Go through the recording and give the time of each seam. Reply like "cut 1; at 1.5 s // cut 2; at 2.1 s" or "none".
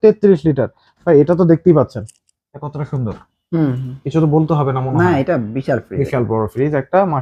none